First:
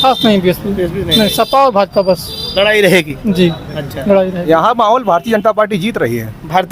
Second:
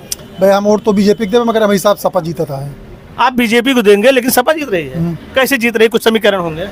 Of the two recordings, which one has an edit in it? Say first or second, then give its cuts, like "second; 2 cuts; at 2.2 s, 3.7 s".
first; 1 cut; at 4.4 s